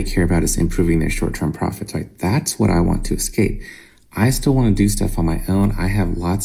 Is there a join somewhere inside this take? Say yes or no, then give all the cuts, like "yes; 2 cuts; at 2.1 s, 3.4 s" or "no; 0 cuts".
no; 0 cuts